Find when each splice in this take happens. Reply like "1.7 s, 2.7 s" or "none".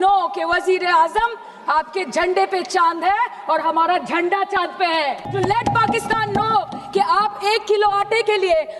5.2 s